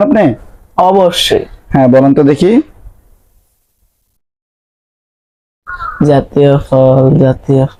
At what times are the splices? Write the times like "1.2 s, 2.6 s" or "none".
none